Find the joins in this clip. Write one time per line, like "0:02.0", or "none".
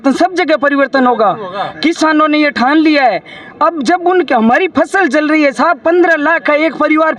none